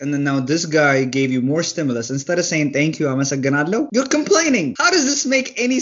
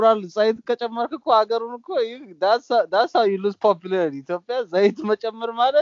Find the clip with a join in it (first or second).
first